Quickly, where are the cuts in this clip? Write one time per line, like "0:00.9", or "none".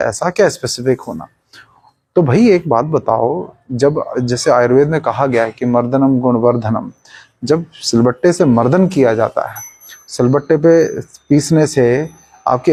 none